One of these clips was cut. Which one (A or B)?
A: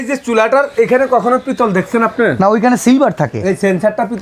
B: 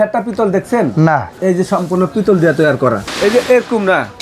B